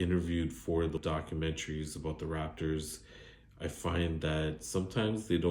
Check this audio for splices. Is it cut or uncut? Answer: cut